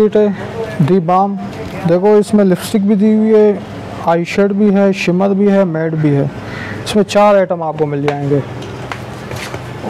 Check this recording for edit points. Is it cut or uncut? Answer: uncut